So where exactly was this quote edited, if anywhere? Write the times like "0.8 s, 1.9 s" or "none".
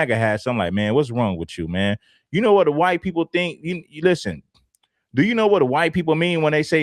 1.9 s, 4.5 s